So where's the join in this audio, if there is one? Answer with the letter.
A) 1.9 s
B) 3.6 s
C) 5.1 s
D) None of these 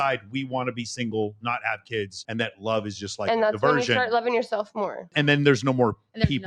C